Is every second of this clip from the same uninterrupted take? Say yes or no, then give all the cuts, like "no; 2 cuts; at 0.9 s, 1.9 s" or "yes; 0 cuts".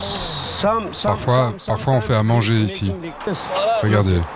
no; 1 cut; at 3.3 s